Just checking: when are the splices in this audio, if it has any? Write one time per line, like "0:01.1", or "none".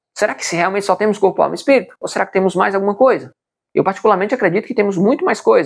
none